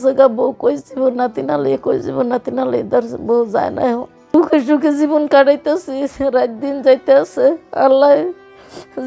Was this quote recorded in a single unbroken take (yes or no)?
no